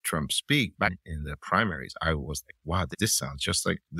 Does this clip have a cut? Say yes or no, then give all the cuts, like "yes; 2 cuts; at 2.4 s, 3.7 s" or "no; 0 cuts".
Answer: yes; 2 cuts; at 1.0 s, 2.9 s